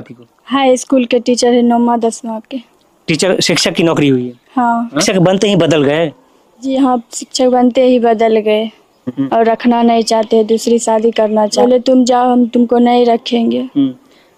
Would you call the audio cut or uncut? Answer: cut